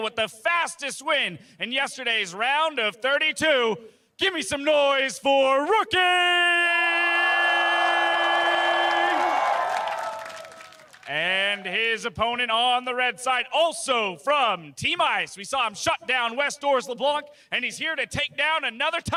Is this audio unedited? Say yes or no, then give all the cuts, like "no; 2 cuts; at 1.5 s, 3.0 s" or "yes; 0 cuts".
yes; 0 cuts